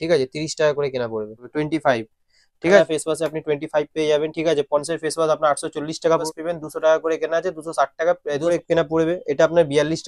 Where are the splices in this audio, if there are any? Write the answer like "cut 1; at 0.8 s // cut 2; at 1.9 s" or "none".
cut 1; at 1.4 s // cut 2; at 2.8 s // cut 3; at 6.2 s // cut 4; at 8.5 s